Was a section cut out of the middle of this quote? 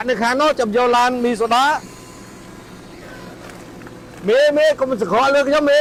no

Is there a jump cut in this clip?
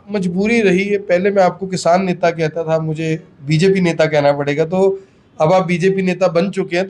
no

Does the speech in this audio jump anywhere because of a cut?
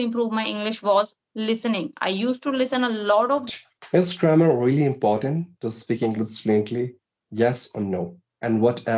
yes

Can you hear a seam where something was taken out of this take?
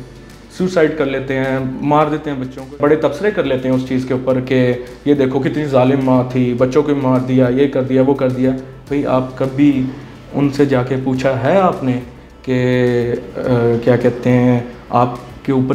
yes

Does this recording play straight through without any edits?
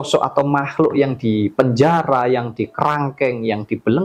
yes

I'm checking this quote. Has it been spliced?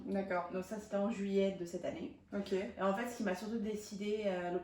no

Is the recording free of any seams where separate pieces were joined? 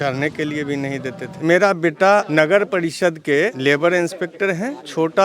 no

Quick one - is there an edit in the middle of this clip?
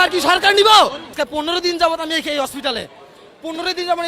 yes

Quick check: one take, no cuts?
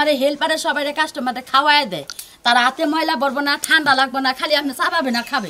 yes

